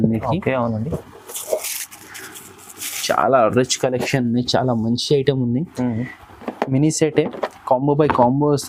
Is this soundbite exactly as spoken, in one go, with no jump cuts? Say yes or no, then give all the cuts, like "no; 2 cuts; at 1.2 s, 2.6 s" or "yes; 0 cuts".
yes; 0 cuts